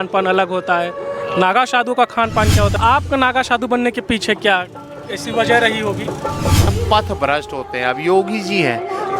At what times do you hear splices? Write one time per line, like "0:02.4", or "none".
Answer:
0:02.8
0:06.7